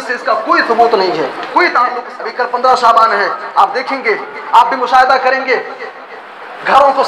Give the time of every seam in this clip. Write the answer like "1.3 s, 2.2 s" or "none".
2.1 s